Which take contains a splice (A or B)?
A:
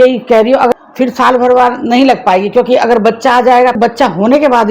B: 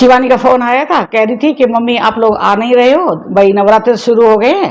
A